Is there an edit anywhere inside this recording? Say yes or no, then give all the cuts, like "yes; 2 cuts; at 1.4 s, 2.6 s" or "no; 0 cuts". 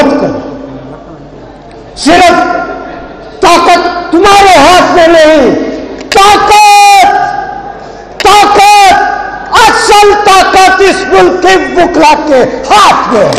no; 0 cuts